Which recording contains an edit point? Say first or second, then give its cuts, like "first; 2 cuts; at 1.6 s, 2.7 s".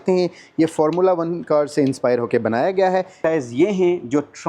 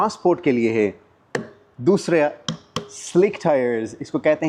first; 1 cut; at 3.2 s